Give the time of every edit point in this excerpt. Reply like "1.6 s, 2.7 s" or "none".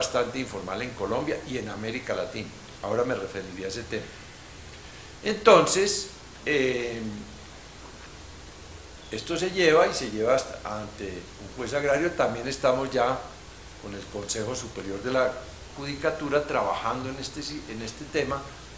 14.7 s